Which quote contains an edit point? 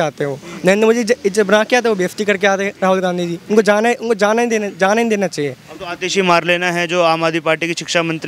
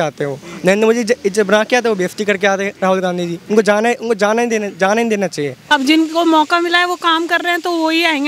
second; 1 cut; at 5.5 s

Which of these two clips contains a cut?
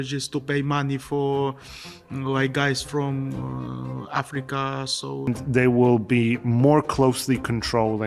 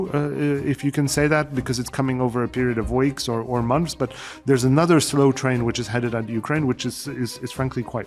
first; 1 cut; at 5.3 s

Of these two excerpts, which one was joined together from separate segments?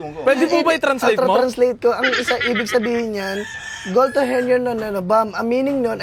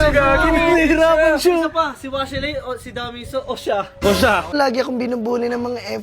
second; 1 cut; at 4.5 s

